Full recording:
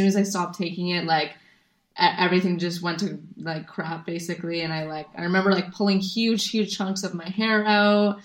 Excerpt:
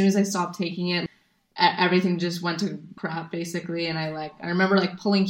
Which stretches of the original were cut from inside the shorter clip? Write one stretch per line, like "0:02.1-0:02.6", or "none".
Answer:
0:01.0-0:01.4
0:03.3-0:03.7